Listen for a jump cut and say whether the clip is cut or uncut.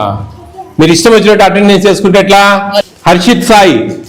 cut